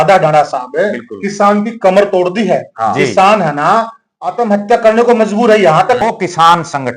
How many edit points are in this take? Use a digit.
1